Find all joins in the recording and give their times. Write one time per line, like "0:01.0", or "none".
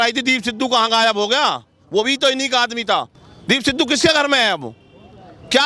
0:03.2